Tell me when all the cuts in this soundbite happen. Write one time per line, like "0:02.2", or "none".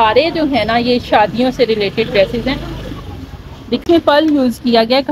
0:03.8